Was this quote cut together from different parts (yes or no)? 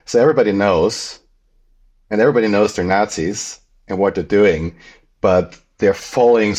no